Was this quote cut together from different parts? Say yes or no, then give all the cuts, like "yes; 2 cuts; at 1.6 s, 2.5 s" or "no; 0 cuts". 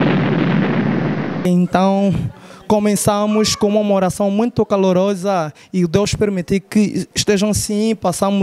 no; 0 cuts